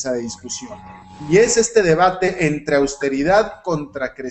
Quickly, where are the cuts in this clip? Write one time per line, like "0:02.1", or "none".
0:03.4